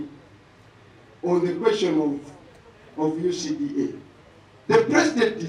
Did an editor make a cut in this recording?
no; 0 cuts

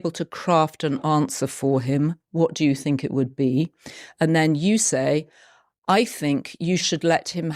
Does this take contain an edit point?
yes; 1 cut; at 3.8 s

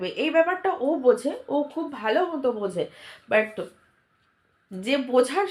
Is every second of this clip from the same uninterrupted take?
yes; 0 cuts

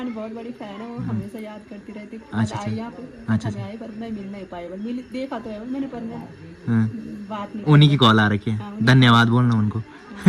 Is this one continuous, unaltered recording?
yes; 0 cuts

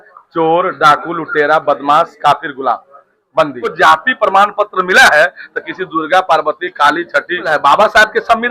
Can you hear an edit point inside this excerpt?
yes; 2 cuts; at 3.6 s, 7.4 s

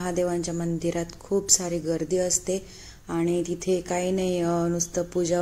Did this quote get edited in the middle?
no; 0 cuts

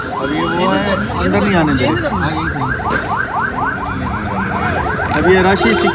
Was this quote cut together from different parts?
no; 0 cuts

